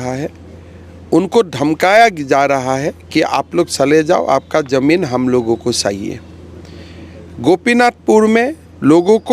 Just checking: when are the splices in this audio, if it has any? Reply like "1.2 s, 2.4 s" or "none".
none